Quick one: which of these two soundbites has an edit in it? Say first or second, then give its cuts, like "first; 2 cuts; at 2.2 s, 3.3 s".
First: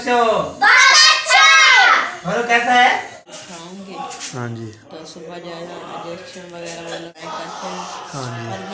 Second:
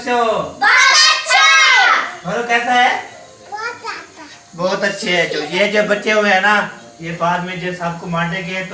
first; 2 cuts; at 3.3 s, 7.2 s